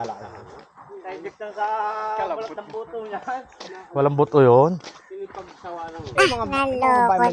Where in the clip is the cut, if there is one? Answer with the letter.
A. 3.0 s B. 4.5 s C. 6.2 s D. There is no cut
C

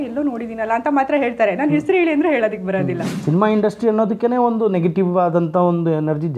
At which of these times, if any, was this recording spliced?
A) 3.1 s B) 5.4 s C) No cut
A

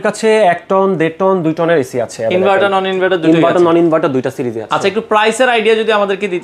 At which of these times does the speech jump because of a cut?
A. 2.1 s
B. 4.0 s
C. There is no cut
C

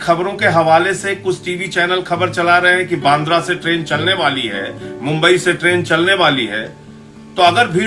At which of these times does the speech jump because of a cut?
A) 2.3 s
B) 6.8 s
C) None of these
C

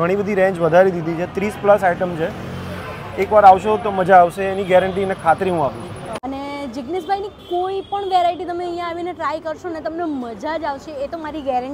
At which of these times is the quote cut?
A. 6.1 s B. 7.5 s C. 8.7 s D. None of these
A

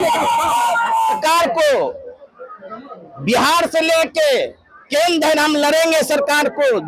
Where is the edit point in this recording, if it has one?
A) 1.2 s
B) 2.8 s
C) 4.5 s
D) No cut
A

